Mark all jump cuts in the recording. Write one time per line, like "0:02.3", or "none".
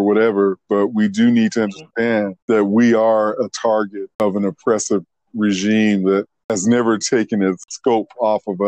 0:02.3
0:04.2
0:06.4
0:07.7